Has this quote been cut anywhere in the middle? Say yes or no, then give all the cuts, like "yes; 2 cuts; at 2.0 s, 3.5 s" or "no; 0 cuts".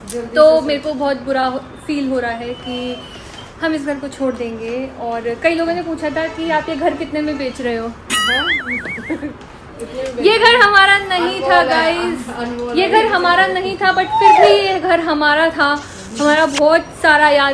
no; 0 cuts